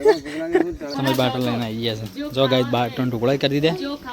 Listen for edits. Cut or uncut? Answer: cut